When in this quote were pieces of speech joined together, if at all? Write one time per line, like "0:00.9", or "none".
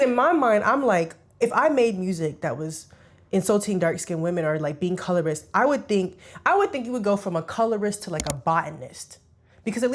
none